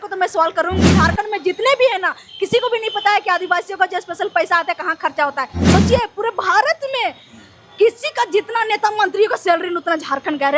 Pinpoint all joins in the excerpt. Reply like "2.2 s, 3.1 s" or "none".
0.9 s, 5.7 s